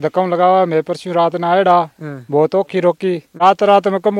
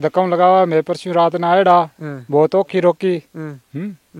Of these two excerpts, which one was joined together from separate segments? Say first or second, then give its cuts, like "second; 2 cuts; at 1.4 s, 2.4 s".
first; 1 cut; at 3.3 s